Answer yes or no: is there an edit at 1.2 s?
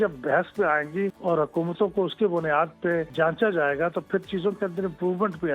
yes